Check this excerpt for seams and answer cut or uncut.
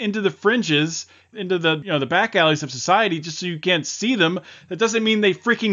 cut